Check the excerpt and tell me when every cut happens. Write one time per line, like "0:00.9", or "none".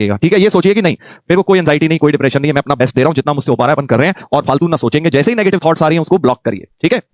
none